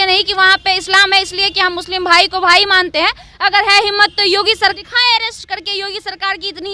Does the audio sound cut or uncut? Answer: cut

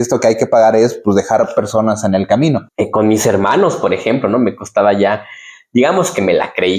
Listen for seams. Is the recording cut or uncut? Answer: cut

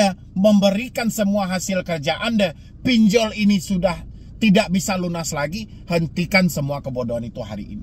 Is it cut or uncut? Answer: uncut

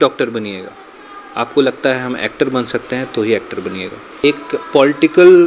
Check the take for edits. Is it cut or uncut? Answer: cut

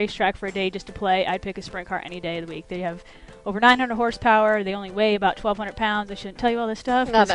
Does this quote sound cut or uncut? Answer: uncut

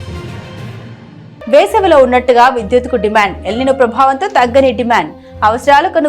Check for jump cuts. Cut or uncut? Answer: cut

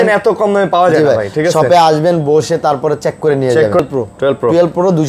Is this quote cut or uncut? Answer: cut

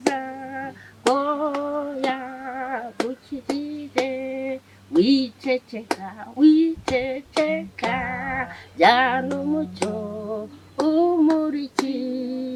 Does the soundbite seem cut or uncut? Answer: uncut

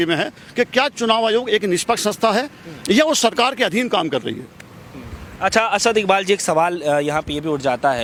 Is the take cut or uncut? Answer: uncut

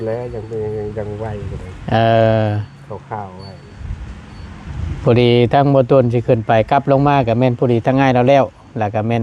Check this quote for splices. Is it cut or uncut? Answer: uncut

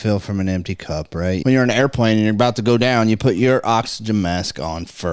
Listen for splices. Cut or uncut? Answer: cut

